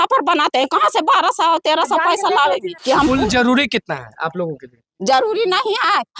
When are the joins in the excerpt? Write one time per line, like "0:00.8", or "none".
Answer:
0:02.7